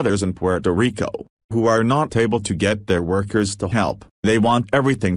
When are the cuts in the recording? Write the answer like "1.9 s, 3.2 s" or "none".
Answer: 4.1 s